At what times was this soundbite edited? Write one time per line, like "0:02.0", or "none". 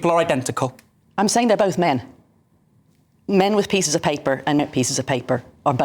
0:04.6